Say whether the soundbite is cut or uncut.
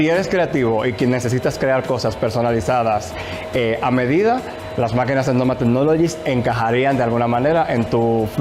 uncut